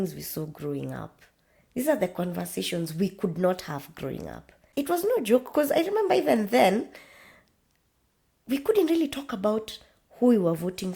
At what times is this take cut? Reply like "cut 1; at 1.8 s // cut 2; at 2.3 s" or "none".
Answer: cut 1; at 4.6 s